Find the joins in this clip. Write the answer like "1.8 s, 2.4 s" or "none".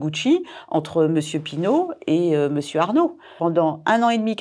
3.3 s